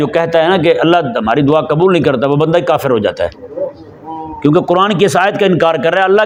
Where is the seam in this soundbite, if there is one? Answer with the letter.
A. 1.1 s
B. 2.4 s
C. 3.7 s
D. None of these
D